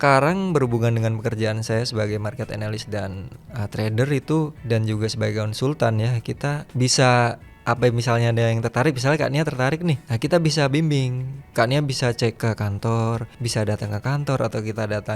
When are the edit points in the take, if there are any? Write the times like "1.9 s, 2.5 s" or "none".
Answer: 4.6 s, 6.7 s, 7.5 s, 10.1 s, 12.4 s, 13.3 s